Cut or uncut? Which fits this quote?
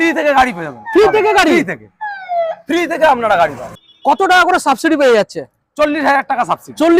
cut